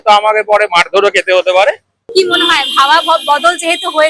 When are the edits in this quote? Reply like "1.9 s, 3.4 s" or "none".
1.9 s